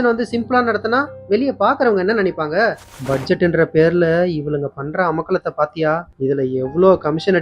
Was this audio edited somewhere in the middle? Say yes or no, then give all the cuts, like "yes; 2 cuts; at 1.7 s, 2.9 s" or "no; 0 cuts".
yes; 2 cuts; at 2.9 s, 6.1 s